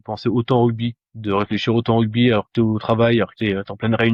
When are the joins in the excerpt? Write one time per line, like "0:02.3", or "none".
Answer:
none